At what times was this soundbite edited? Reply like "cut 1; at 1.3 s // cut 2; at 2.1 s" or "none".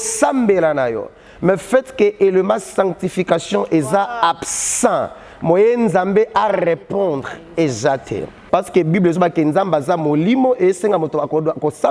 cut 1; at 8.3 s